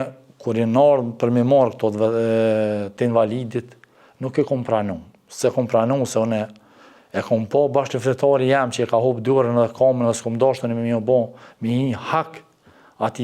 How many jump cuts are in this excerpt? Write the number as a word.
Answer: zero